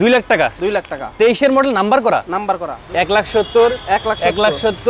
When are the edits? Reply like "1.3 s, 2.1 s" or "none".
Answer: 2.7 s